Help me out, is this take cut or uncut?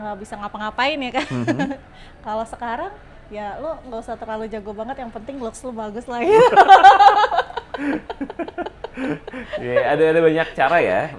uncut